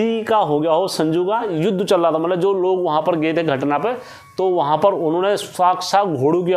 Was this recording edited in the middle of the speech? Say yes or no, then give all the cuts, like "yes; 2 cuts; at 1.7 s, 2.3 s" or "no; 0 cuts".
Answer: yes; 1 cut; at 1.5 s